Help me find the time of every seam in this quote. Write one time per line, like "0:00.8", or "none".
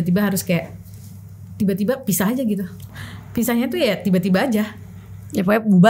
none